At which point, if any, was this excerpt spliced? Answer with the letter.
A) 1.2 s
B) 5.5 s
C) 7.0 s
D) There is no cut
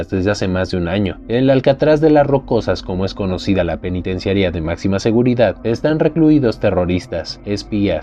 D